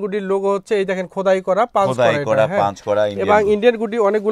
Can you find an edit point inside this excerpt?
no; 0 cuts

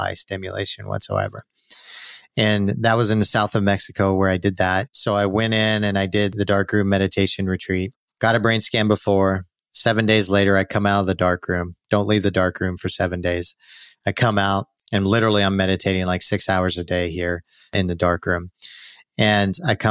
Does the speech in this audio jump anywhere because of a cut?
yes; 1 cut; at 4.9 s

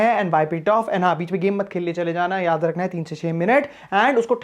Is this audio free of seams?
yes; 0 cuts

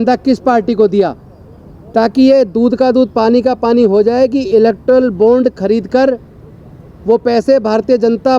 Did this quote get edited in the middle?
no; 0 cuts

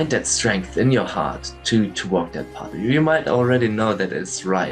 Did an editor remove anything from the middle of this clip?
yes; 1 cut; at 2.7 s

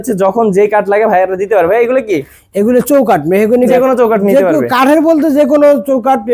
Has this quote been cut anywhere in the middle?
yes; 1 cut; at 3.7 s

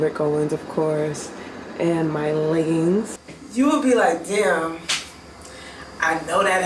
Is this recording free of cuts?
no; 1 cut; at 3.2 s

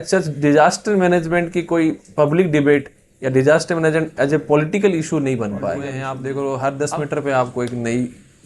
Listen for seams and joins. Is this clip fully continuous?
no; 1 cut; at 6.1 s

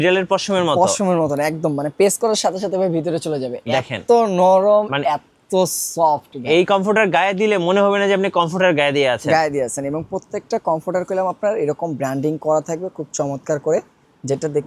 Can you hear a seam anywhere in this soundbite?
no; 0 cuts

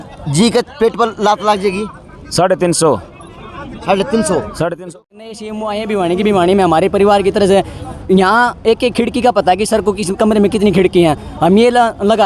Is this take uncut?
no; 1 cut; at 4.8 s

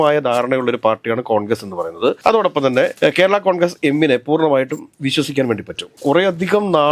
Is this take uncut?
yes; 0 cuts

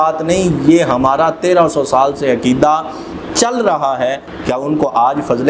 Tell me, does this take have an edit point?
yes; 1 cut; at 4.3 s

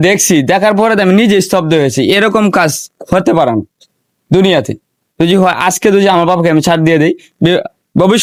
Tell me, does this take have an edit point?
no; 0 cuts

